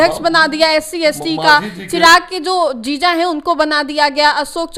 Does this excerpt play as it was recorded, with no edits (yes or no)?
yes